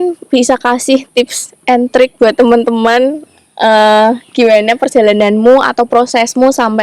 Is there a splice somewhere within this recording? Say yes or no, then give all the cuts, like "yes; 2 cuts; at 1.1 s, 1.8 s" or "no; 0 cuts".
no; 0 cuts